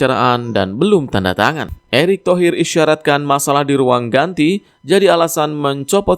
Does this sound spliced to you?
yes; 1 cut; at 1.7 s

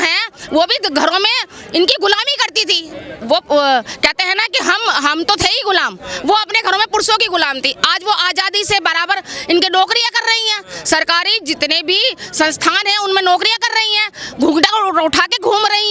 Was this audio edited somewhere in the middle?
no; 0 cuts

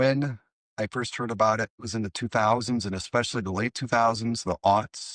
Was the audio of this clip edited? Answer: yes; 1 cut; at 1.9 s

